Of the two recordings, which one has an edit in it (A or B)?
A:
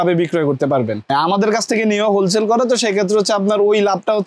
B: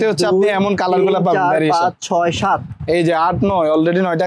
A